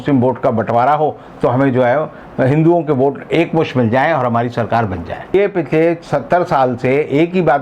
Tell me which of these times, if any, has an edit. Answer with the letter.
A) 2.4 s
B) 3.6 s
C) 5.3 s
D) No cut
C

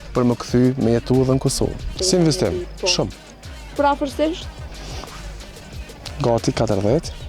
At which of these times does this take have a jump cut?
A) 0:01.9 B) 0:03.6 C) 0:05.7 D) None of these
A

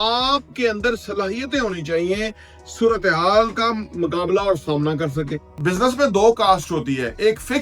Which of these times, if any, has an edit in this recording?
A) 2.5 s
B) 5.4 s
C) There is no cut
B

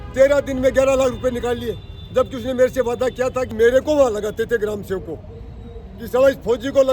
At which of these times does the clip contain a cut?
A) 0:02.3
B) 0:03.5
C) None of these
B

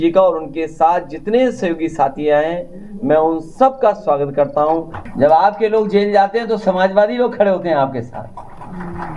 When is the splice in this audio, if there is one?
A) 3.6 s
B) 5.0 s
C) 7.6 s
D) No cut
B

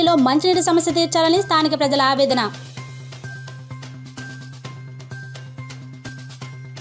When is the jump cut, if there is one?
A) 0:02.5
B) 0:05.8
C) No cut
A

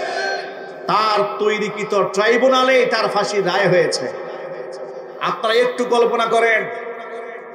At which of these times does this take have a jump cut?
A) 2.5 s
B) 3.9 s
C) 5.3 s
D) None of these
D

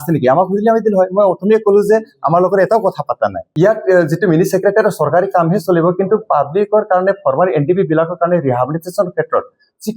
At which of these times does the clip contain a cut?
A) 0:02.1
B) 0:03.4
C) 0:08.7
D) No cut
B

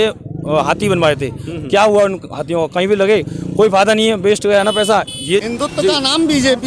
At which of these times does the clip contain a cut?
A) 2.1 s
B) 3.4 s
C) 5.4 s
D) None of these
C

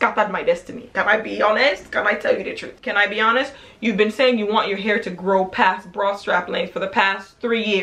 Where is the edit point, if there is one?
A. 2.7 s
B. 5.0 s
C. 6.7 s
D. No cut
A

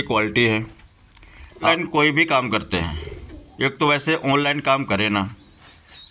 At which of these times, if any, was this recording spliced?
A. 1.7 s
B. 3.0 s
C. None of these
A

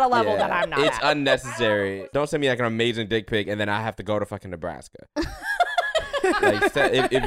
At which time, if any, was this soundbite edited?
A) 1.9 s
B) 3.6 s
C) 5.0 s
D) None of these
A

